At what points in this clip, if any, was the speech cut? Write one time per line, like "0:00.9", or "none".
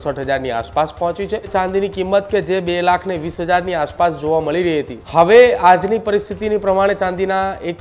0:01.5
0:04.9